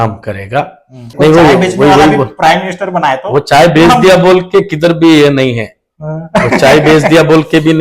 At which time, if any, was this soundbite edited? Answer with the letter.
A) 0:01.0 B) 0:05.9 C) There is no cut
A